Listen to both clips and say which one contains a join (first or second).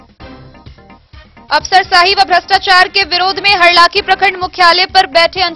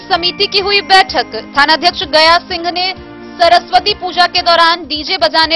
first